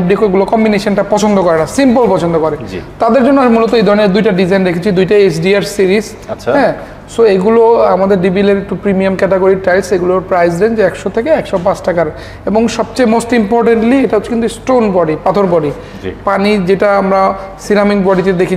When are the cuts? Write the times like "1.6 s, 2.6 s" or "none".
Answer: none

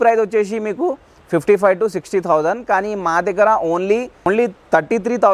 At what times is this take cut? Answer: 4.3 s

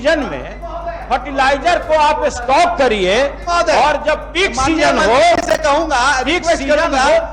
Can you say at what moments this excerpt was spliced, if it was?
none

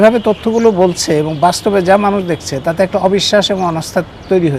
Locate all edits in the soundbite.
none

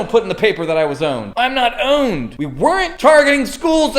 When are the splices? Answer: 1.2 s, 2.7 s

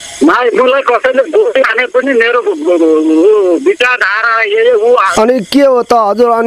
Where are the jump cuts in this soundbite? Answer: 5.1 s

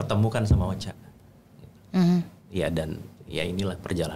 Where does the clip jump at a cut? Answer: none

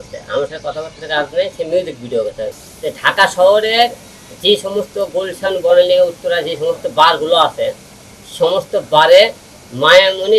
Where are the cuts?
2.5 s

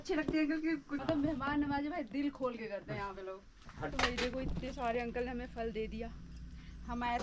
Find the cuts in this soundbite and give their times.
0.9 s, 3.9 s

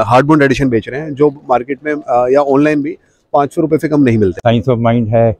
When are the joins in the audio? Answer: 4.4 s

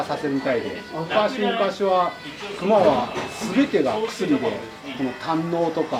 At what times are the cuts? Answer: none

